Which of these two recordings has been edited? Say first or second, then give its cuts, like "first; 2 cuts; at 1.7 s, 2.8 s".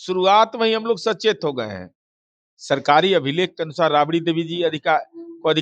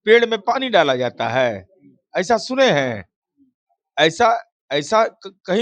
first; 1 cut; at 2.5 s